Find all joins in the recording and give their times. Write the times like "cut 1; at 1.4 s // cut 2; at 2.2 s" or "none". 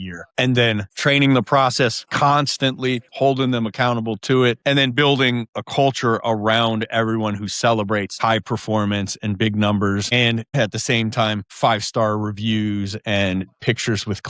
cut 1; at 3.1 s // cut 2; at 4.6 s // cut 3; at 5.5 s // cut 4; at 10.5 s